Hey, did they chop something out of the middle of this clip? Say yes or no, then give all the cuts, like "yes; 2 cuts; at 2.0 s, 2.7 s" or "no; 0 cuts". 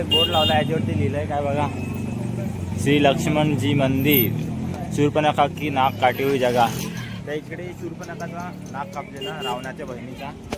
no; 0 cuts